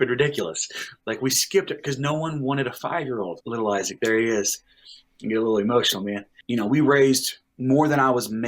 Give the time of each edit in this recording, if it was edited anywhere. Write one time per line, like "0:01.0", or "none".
0:03.4
0:06.3